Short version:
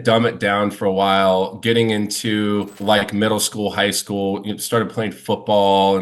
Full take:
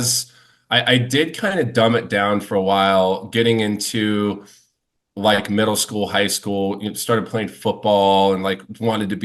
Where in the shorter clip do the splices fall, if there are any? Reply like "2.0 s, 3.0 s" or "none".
2.7 s